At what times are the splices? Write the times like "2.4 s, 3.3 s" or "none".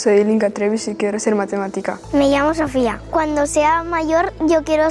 2.0 s